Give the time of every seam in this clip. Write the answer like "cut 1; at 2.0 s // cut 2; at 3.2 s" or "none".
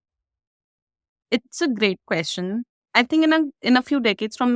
cut 1; at 1.1 s // cut 2; at 2.8 s